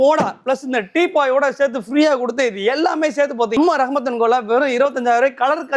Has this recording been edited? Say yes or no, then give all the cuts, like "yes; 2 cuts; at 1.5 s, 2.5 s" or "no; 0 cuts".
no; 0 cuts